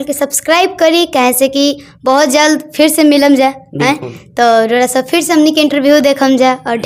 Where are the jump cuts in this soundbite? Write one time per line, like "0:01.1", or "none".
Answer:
none